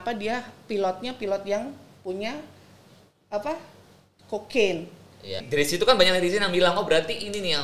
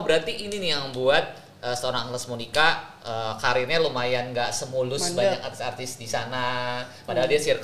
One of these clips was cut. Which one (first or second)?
first